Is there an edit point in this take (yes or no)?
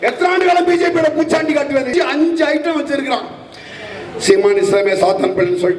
yes